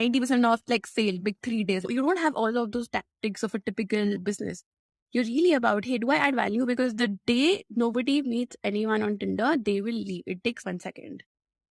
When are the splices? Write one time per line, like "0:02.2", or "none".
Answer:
0:01.9
0:10.6